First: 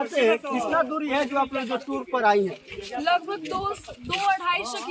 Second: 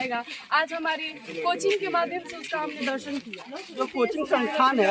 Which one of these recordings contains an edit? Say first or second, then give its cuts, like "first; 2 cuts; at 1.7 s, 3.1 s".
second; 1 cut; at 3.6 s